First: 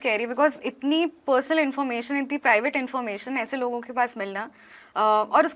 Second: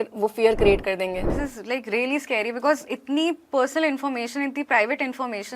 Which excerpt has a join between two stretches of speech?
second; 1 cut; at 1.3 s

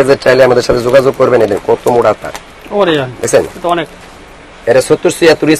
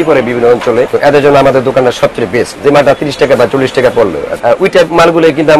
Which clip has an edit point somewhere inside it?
second; 3 cuts; at 0.9 s, 2.5 s, 4.3 s

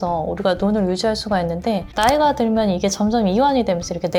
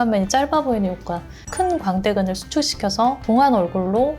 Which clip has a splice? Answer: second; 2 cuts; at 1.4 s, 3.2 s

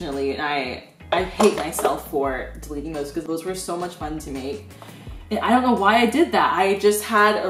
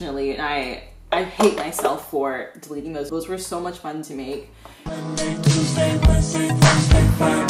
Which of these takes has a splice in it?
second; 2 cuts; at 3.1 s, 5.0 s

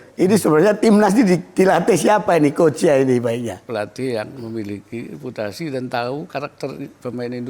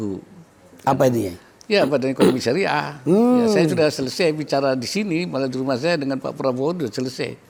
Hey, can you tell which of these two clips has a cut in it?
first; 1 cut; at 3.6 s

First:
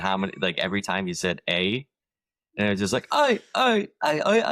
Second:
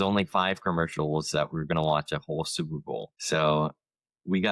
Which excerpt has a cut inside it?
second; 1 cut; at 3.1 s

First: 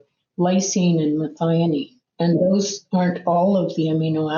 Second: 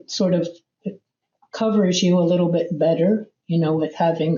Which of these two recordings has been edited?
first; 1 cut; at 2.0 s

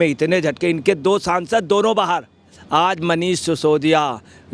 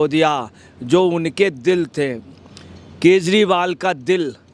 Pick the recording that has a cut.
first; 1 cut; at 2.5 s

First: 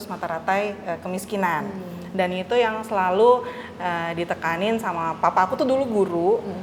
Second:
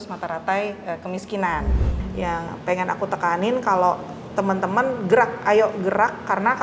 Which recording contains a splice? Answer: second; 1 cut; at 2.0 s

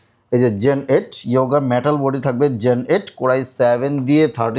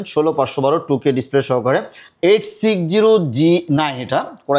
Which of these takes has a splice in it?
second; 1 cut; at 2.0 s

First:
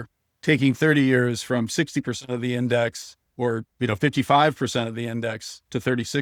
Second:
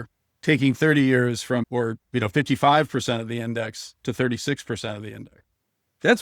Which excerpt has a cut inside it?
second; 1 cut; at 1.7 s

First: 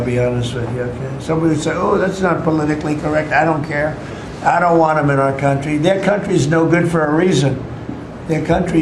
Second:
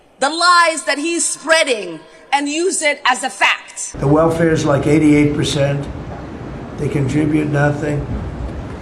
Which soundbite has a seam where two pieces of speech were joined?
second; 1 cut; at 4.0 s

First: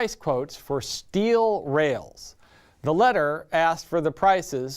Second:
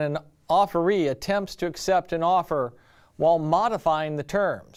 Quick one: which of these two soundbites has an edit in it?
first; 1 cut; at 2.1 s

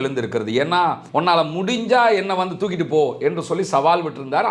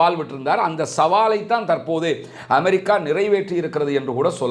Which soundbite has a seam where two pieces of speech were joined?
first; 1 cut; at 1.0 s

